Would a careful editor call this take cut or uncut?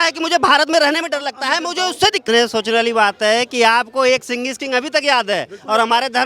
cut